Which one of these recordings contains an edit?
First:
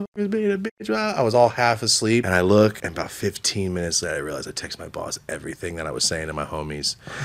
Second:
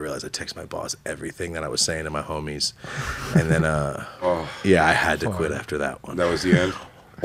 first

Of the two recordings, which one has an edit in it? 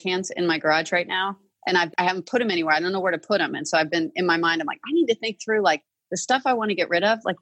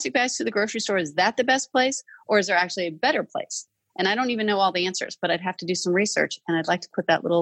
first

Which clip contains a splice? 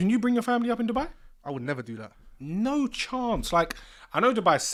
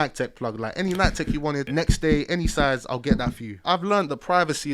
second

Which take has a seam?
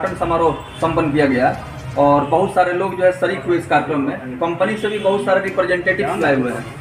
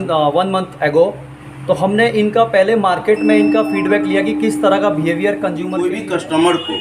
second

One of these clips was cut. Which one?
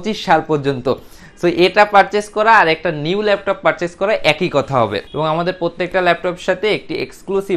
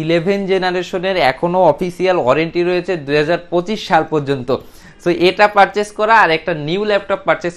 first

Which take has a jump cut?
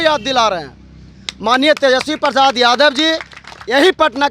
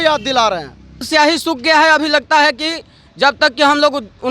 second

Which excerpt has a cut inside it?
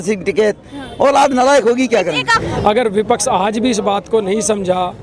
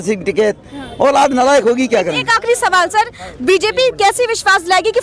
first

